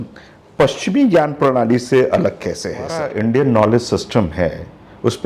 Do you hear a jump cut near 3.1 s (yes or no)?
yes